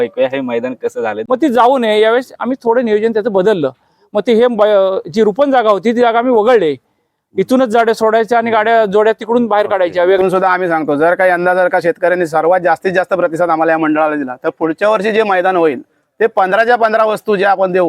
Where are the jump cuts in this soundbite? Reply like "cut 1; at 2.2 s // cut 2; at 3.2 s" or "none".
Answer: cut 1; at 1.2 s // cut 2; at 10.2 s

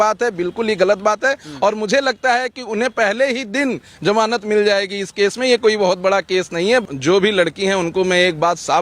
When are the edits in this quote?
cut 1; at 6.8 s

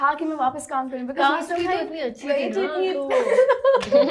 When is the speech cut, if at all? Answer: none

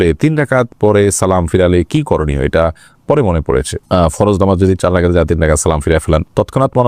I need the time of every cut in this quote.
none

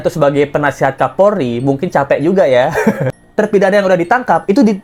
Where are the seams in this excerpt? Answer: cut 1; at 3.1 s

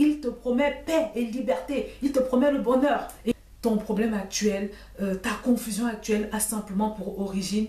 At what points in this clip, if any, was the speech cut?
cut 1; at 3.3 s

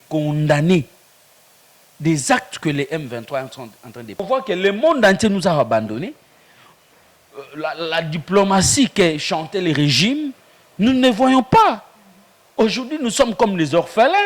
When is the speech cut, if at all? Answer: cut 1; at 4.2 s

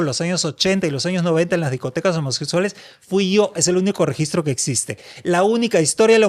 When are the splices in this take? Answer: none

